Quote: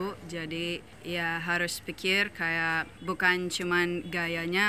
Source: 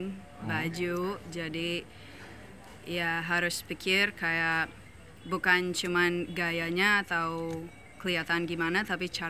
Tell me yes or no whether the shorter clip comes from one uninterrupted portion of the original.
no